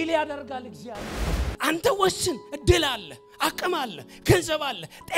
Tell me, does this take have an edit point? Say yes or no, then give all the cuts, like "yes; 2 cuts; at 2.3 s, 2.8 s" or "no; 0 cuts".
yes; 1 cut; at 1.4 s